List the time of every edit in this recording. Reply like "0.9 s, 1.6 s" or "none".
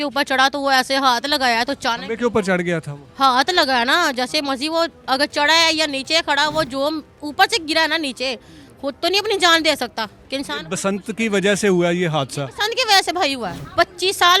none